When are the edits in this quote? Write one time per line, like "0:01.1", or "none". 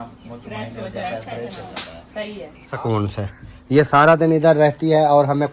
0:02.6